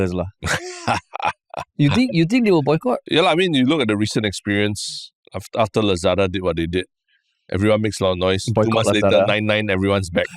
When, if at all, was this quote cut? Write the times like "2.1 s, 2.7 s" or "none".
3.0 s